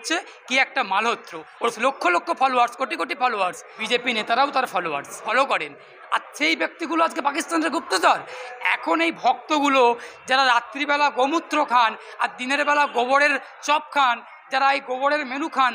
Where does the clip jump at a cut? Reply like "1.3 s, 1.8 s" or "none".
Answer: 1.8 s, 3.7 s, 5.3 s

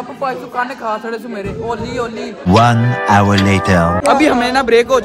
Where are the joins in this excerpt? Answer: none

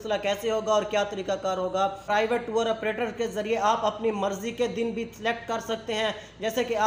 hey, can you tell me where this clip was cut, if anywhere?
2.0 s

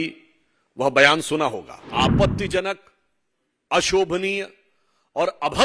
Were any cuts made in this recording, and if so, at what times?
1.8 s

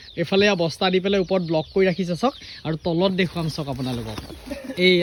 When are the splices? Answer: none

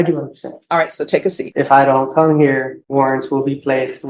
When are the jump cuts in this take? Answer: 1.3 s, 2.8 s

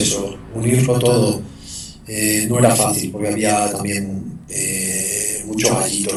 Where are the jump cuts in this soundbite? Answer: none

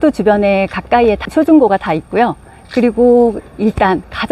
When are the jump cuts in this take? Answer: 1.2 s

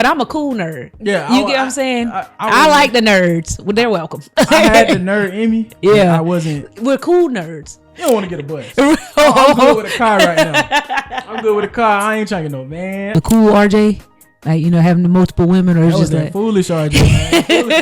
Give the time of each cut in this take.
7.8 s, 13.0 s

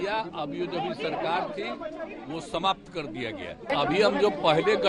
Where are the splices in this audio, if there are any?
3.7 s

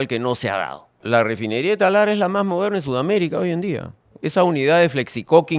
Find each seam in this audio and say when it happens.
1.0 s

